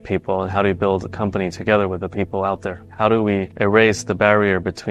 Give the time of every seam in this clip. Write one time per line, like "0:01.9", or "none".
0:02.9